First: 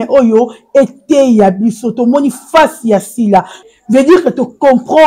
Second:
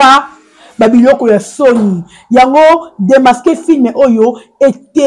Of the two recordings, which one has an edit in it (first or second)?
first